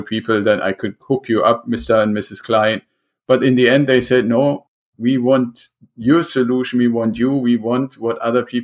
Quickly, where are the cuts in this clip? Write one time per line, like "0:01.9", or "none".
none